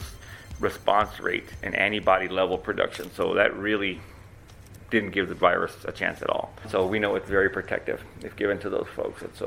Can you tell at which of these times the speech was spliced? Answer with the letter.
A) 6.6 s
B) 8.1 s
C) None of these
A